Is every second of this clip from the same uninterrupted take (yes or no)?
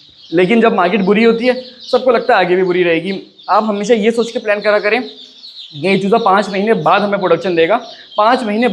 yes